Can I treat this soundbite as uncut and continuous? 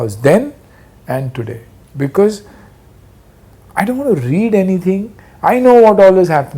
yes; 0 cuts

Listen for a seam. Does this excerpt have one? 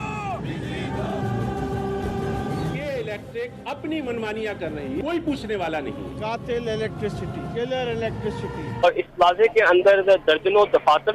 yes; 1 cut; at 8.8 s

